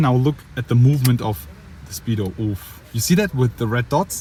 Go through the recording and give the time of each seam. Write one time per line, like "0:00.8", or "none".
none